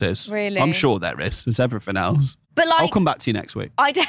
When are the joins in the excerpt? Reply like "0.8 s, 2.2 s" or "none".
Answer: 2.4 s